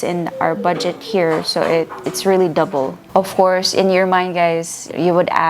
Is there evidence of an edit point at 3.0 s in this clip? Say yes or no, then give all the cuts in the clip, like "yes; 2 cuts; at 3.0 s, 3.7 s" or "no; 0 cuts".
yes; 1 cut; at 3.0 s